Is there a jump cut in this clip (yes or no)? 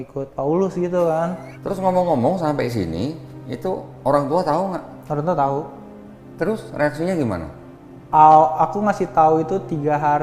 yes